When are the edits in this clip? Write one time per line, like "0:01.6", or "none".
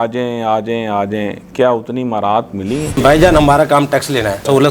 0:02.9